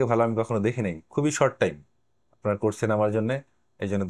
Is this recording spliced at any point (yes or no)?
no